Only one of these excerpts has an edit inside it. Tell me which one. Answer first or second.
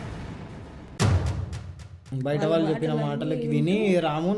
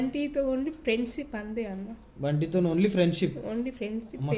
first